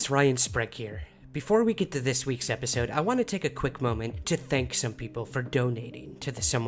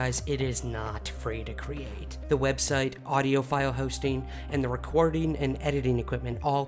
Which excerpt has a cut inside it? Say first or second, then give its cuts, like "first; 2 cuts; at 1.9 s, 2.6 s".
first; 1 cut; at 1.6 s